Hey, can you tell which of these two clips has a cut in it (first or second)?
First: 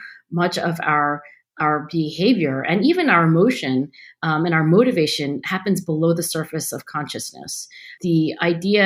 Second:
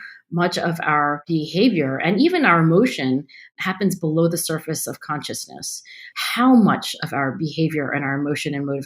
second